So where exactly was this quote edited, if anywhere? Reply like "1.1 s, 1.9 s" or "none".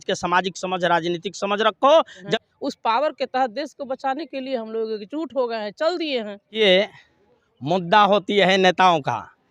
2.3 s, 6.6 s